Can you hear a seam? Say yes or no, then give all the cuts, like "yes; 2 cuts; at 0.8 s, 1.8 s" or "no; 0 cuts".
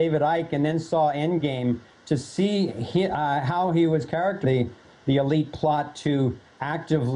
no; 0 cuts